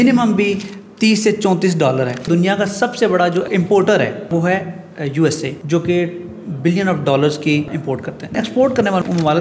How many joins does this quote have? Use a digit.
3